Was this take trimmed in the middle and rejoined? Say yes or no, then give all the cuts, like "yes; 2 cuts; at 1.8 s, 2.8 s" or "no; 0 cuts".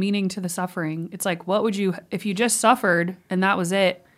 no; 0 cuts